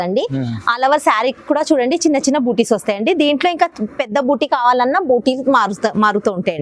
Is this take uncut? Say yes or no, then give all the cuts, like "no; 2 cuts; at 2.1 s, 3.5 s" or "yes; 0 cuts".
yes; 0 cuts